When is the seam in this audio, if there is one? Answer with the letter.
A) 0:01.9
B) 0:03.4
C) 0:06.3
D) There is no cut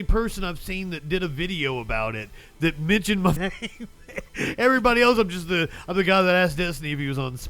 B